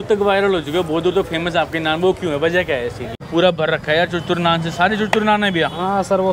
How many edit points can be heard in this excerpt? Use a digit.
1